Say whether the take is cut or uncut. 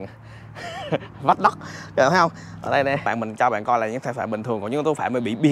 cut